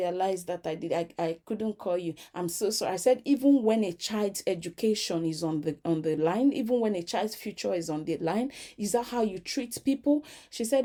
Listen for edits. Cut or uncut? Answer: uncut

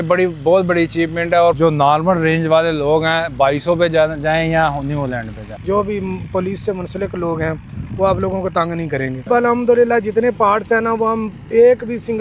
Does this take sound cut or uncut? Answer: cut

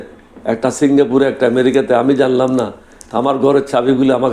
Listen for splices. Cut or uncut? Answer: uncut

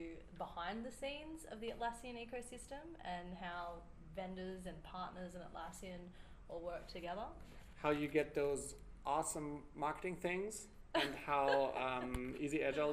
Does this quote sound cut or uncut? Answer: uncut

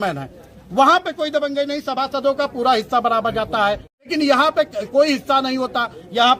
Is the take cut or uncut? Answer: cut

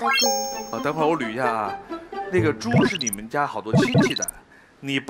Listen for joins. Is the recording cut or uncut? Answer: cut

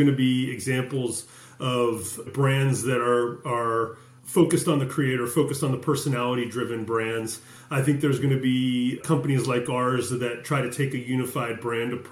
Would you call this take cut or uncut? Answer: uncut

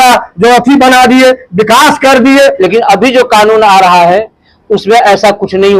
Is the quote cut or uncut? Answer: cut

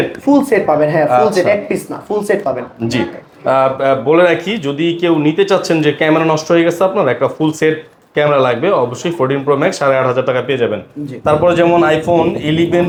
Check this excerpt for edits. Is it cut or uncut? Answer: uncut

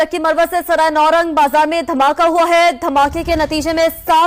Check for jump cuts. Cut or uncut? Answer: uncut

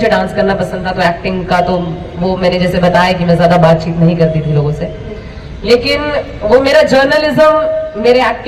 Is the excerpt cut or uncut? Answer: uncut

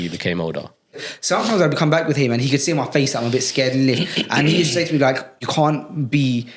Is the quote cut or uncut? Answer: cut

